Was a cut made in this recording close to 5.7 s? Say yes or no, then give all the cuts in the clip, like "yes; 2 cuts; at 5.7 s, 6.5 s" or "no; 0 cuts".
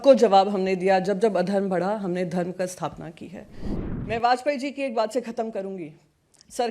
no; 1 cut; at 3.7 s